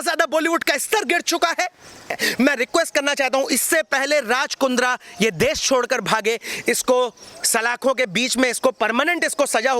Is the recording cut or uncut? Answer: cut